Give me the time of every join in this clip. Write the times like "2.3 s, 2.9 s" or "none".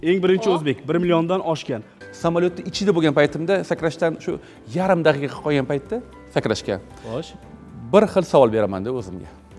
2.0 s